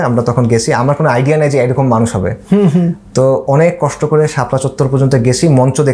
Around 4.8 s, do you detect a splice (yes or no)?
no